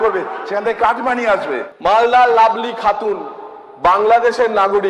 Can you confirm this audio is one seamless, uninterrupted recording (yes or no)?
no